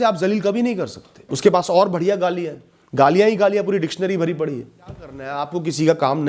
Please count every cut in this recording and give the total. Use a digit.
1